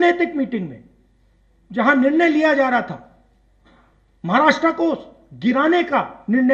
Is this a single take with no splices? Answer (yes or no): yes